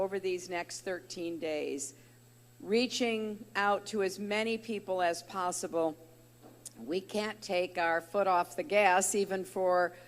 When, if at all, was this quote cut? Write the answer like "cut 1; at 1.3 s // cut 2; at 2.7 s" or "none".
cut 1; at 2.6 s